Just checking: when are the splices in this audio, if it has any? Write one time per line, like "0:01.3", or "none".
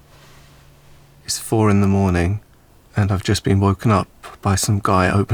none